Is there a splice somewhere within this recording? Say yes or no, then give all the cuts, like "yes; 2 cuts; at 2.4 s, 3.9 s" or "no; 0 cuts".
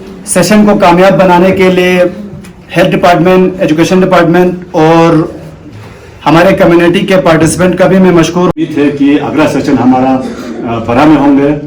yes; 1 cut; at 8.6 s